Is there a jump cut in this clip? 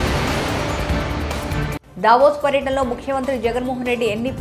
yes; 1 cut; at 1.7 s

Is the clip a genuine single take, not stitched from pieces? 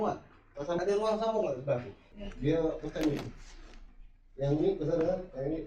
no; 2 cuts; at 0.8 s, 2.2 s

